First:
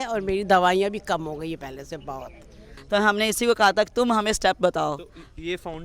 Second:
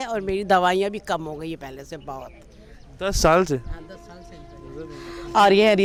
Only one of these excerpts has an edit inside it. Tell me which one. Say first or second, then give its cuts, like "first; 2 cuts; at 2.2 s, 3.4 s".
first; 1 cut; at 2.7 s